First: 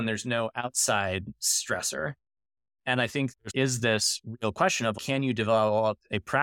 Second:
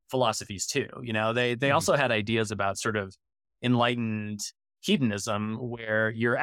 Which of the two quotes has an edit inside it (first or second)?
first